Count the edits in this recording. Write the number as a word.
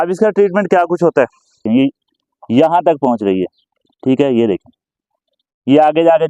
one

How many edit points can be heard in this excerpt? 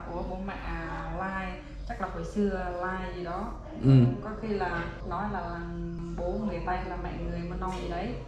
two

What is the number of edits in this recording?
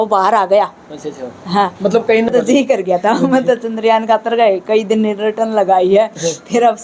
one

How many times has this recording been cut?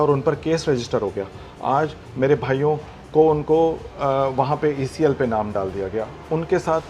zero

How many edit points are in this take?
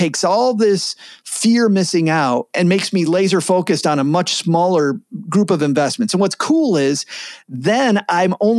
one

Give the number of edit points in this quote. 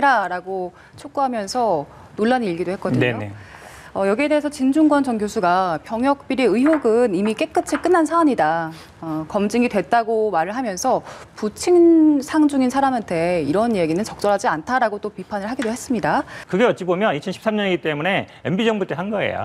one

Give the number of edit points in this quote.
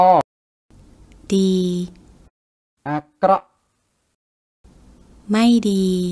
one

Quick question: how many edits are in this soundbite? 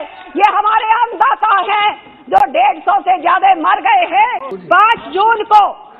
one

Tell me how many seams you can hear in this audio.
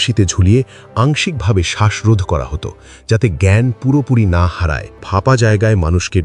one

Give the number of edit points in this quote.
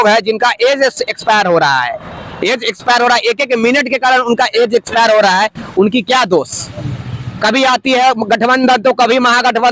zero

